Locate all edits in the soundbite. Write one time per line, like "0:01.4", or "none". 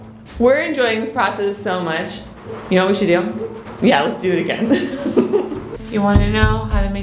0:03.6
0:05.7